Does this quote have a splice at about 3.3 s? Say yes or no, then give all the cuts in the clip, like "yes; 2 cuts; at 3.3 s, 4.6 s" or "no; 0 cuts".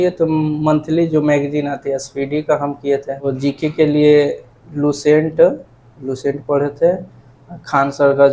yes; 1 cut; at 3.3 s